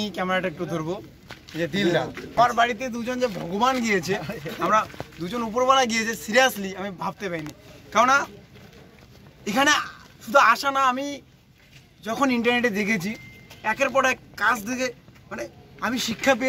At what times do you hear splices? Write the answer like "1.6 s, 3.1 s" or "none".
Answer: 2.4 s